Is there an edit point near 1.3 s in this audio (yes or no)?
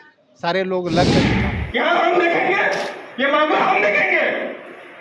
yes